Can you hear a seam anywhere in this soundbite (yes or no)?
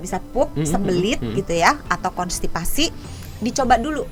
no